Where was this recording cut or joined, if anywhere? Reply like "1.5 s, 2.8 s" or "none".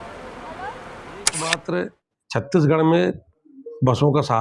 1.3 s